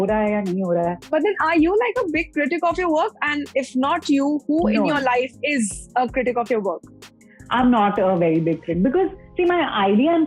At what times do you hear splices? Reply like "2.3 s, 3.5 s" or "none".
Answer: none

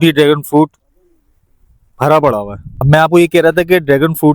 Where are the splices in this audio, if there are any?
2.8 s

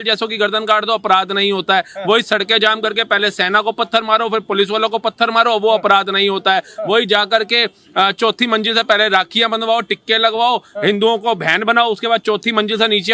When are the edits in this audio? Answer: none

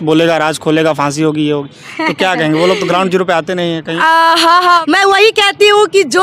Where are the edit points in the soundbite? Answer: 4.8 s

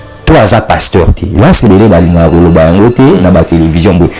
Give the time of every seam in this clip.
1.7 s

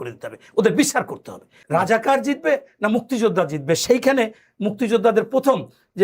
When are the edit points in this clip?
1.5 s

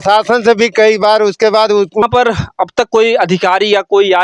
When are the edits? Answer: 2.0 s

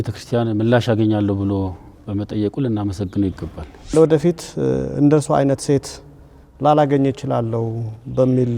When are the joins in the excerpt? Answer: 3.9 s

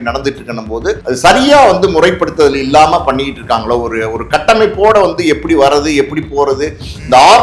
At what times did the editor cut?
1.0 s

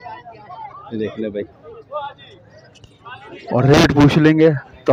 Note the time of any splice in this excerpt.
none

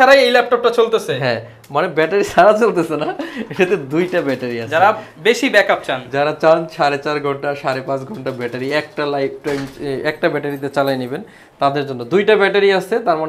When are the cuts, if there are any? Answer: none

